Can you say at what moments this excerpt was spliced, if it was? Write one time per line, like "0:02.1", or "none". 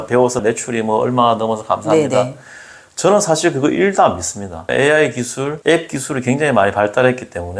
0:04.7
0:05.5